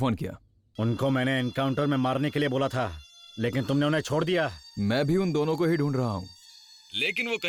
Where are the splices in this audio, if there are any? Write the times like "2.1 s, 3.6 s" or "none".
none